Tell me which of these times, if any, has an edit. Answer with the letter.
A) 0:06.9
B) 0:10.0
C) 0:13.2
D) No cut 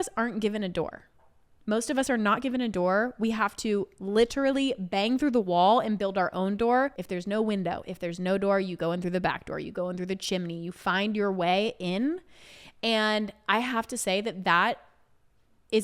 A